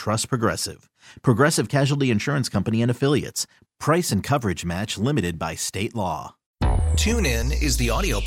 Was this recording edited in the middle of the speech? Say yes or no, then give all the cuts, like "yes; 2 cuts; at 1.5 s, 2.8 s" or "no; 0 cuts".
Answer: yes; 1 cut; at 6.4 s